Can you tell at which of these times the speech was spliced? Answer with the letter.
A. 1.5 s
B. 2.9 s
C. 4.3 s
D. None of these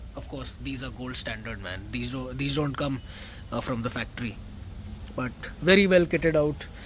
D